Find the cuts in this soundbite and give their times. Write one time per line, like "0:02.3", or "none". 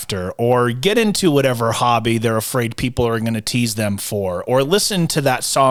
none